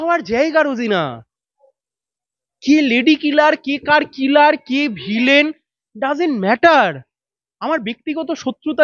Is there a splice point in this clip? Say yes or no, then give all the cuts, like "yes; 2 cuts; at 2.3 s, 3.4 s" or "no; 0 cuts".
no; 0 cuts